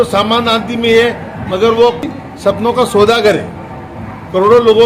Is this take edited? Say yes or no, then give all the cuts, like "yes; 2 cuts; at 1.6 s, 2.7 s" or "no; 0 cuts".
yes; 1 cut; at 2.1 s